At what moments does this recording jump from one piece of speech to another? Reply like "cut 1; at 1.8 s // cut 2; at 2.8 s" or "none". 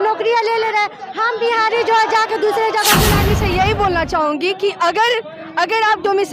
cut 1; at 3.1 s